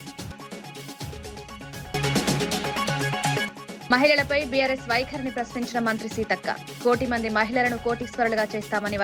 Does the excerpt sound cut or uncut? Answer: cut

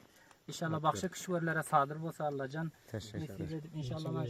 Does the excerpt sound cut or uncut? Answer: uncut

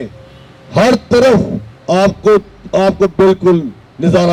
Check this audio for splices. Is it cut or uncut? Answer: uncut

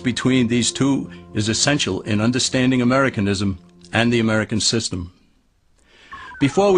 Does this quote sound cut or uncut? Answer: uncut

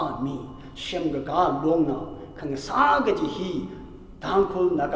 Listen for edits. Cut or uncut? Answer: uncut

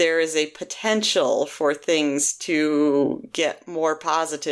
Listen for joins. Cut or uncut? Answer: uncut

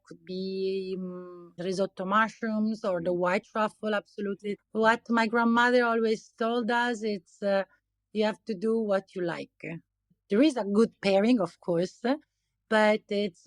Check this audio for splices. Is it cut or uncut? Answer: cut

